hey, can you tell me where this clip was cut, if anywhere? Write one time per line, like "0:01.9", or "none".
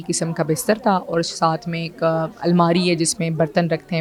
none